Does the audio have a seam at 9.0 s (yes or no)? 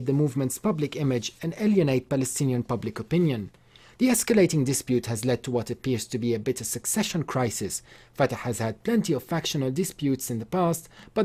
no